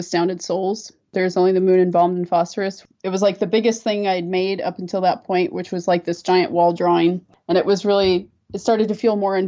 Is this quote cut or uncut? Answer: cut